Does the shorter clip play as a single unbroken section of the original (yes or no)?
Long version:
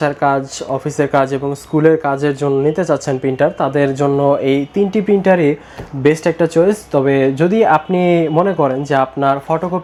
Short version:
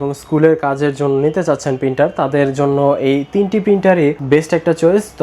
no